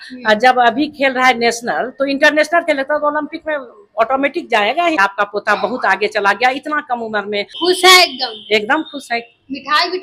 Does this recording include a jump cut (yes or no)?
yes